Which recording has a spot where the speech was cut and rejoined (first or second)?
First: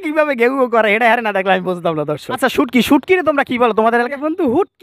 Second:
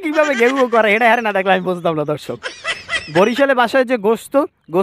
first